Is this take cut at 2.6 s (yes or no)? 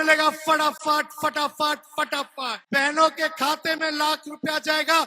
yes